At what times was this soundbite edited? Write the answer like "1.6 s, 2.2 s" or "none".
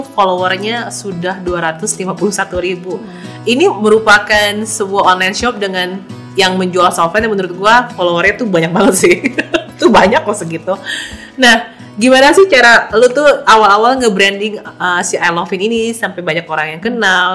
none